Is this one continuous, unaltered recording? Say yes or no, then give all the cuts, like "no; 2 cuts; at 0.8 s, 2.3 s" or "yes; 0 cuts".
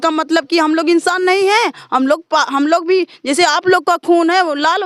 yes; 0 cuts